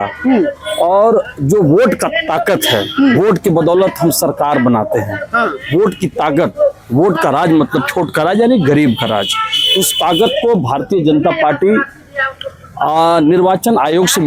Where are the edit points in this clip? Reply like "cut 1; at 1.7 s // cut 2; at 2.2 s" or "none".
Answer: none

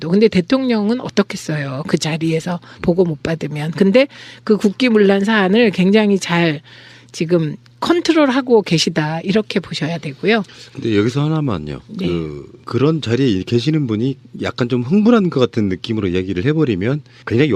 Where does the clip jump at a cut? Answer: none

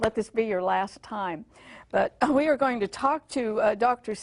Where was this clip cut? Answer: cut 1; at 1.4 s

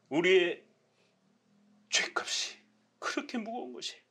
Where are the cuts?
none

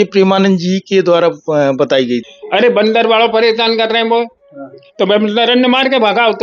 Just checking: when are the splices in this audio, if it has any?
cut 1; at 2.3 s

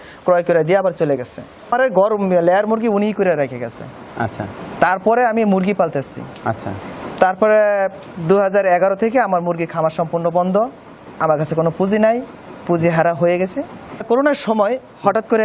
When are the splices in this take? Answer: cut 1; at 1.7 s // cut 2; at 13.9 s

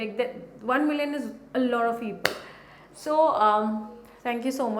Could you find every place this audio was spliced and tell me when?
none

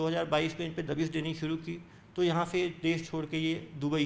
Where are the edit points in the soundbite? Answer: none

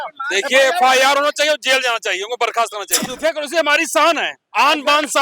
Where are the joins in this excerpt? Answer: cut 1; at 2.9 s

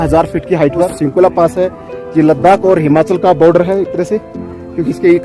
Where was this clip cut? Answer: cut 1; at 0.9 s

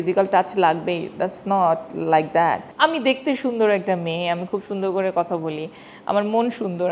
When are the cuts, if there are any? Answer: cut 1; at 2.7 s

